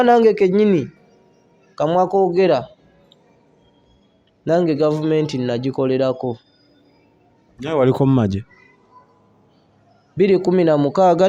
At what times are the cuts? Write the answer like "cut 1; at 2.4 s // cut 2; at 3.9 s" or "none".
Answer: none

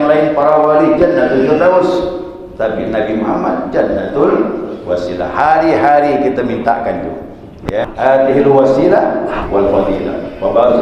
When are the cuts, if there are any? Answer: cut 1; at 7.9 s

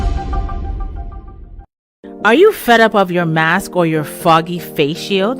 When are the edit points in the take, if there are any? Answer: cut 1; at 2.0 s

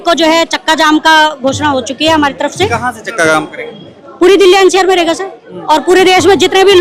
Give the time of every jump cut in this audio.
none

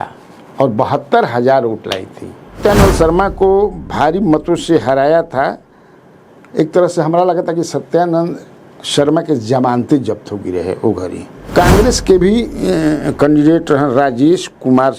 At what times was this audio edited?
cut 1; at 2.6 s // cut 2; at 11.4 s

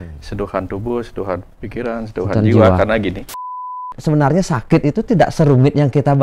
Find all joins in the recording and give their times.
cut 1; at 3.8 s

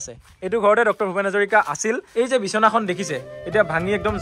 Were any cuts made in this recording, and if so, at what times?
cut 1; at 2.1 s

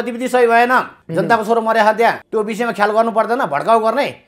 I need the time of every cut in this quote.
cut 1; at 1.0 s // cut 2; at 2.2 s

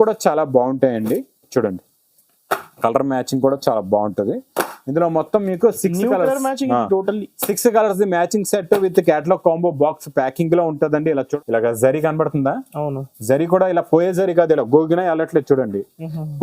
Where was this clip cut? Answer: cut 1; at 11.3 s

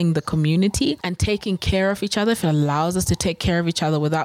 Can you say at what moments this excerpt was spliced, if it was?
cut 1; at 1.1 s

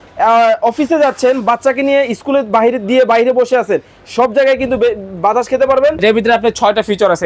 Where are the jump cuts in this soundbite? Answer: cut 1; at 6.0 s

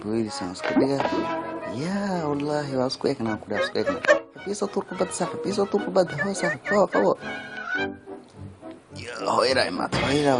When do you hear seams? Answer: cut 1; at 6.7 s

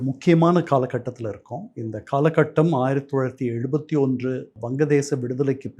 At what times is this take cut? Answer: cut 1; at 4.6 s

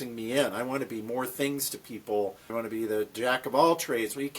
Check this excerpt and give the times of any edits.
cut 1; at 2.5 s

